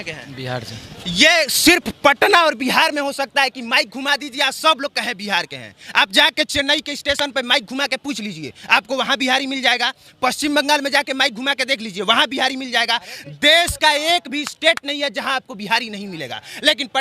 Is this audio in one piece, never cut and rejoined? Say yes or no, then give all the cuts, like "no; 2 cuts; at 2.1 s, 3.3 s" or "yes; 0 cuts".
yes; 0 cuts